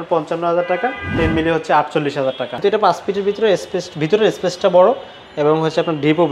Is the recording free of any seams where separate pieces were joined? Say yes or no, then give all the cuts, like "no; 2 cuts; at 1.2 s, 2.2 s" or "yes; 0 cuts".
no; 1 cut; at 2.5 s